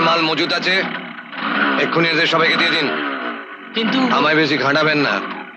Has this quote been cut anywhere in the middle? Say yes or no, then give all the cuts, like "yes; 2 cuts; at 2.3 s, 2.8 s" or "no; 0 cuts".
no; 0 cuts